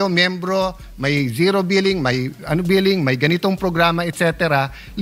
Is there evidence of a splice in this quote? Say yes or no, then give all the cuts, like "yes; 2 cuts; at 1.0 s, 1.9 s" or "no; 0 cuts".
no; 0 cuts